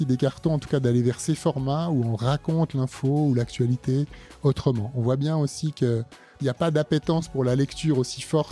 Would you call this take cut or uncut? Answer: cut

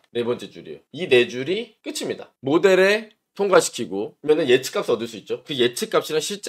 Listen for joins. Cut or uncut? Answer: uncut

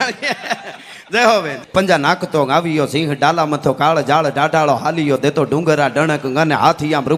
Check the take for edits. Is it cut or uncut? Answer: cut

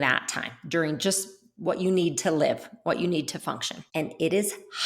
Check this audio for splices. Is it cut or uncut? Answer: cut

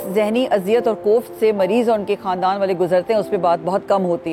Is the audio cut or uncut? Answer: uncut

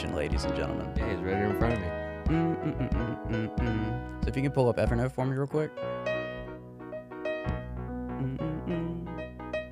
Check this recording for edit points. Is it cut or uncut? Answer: uncut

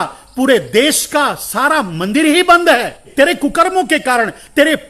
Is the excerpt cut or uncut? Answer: cut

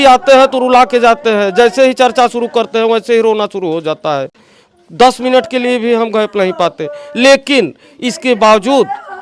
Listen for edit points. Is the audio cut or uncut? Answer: uncut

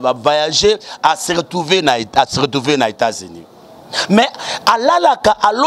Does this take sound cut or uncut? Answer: uncut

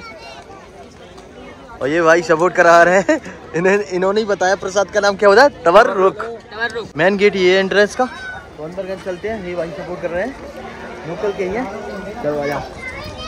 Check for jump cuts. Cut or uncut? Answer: uncut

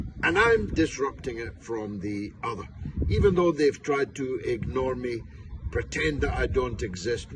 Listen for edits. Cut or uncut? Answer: uncut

